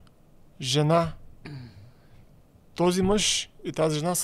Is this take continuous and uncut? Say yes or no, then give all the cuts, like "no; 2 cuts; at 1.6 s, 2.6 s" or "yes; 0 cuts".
yes; 0 cuts